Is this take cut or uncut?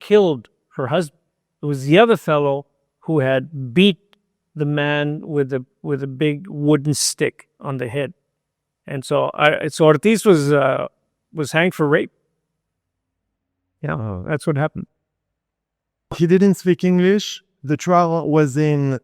uncut